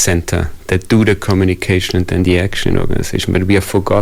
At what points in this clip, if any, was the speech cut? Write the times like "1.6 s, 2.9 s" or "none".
none